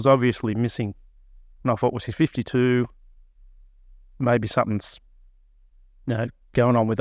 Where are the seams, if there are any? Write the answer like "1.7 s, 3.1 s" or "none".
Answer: none